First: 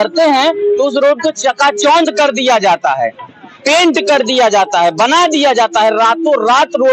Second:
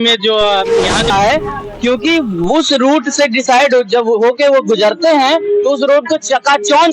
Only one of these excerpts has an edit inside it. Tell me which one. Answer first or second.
second